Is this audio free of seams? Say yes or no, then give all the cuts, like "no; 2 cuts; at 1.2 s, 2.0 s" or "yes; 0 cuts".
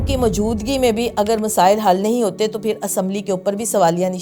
yes; 0 cuts